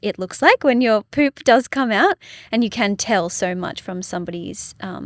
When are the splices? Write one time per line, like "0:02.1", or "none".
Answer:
none

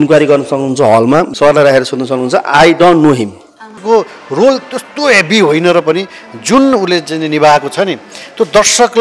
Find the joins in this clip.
0:01.3
0:03.7

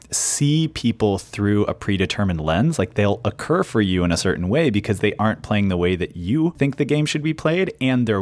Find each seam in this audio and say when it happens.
0:06.5

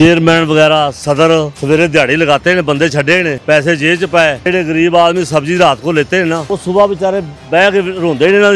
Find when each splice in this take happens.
0:01.5
0:03.4
0:04.4
0:06.5

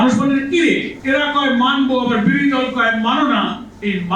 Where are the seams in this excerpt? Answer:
0:00.9

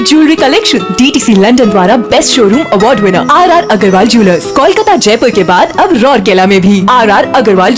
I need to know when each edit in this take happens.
none

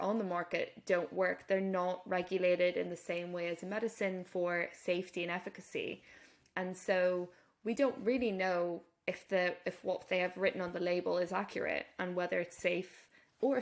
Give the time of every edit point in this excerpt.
none

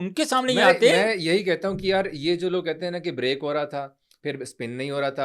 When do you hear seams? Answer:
none

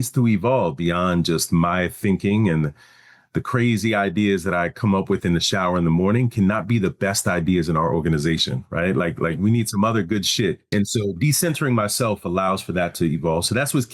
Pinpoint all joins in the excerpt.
0:10.6

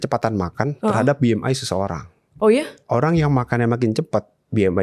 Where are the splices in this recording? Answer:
none

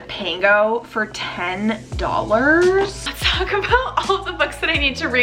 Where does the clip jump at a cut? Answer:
0:03.0

